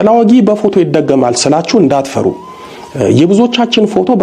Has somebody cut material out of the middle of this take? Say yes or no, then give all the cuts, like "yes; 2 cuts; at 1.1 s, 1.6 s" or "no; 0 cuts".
yes; 1 cut; at 1.6 s